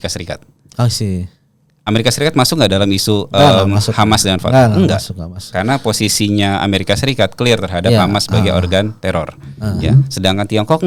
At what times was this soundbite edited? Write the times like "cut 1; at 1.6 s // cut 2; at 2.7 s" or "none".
none